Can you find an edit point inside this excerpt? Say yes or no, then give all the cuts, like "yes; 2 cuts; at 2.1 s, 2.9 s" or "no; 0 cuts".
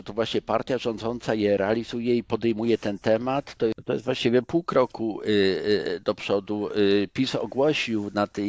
yes; 1 cut; at 3.8 s